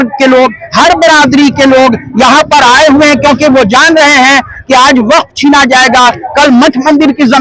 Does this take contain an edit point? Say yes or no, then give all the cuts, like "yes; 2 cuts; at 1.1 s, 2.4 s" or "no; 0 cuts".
no; 0 cuts